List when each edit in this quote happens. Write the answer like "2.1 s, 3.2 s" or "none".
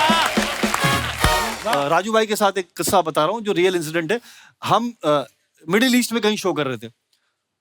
1.7 s